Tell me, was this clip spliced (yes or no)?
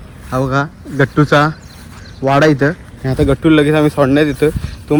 no